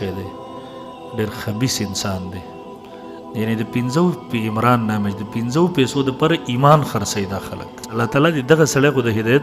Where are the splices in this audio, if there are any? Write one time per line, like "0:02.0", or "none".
0:07.9